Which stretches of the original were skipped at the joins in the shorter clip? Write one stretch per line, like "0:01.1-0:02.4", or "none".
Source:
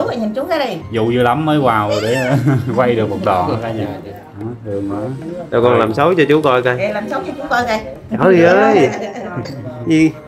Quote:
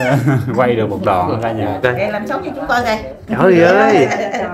0:04.0-0:06.6